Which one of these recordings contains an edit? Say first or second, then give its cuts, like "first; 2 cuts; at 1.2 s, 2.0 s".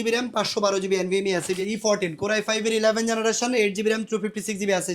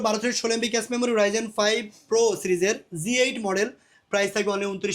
first; 1 cut; at 1.6 s